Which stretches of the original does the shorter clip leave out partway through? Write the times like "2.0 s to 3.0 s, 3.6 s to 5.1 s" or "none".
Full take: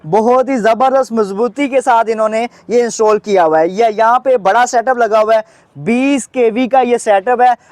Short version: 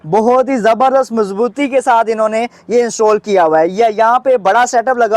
none